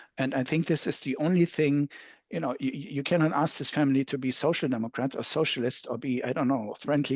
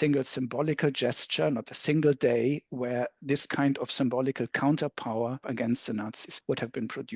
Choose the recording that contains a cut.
second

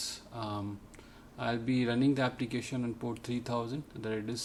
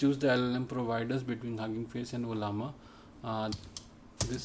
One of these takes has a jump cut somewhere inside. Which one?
second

